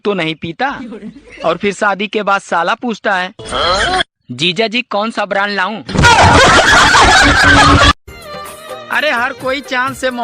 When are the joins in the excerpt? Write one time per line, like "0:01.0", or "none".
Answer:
0:08.1